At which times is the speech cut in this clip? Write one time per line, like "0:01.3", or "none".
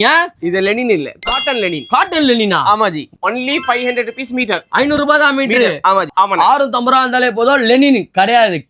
0:03.1
0:06.1

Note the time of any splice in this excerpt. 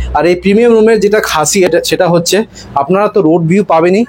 0:01.7

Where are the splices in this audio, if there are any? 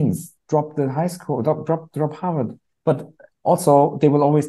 0:02.6

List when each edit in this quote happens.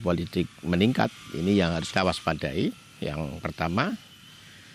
0:01.8

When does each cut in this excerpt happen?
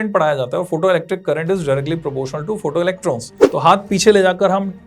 0:03.3

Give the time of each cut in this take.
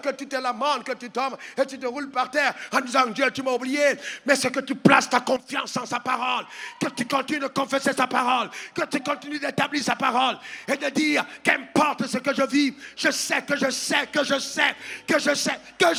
none

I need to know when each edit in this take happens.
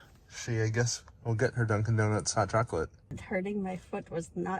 0:03.1

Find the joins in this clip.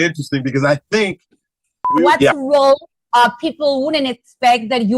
0:01.9

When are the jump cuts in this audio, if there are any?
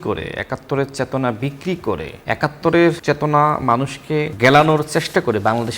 0:02.2
0:03.0
0:04.3

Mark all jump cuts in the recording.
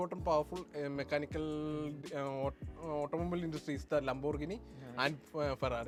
none

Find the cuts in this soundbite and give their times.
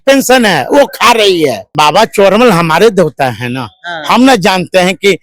0:01.6

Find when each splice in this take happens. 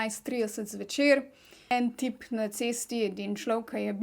0:01.7

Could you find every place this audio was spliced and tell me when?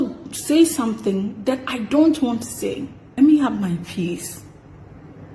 0:03.0

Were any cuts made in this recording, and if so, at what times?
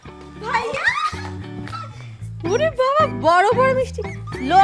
none

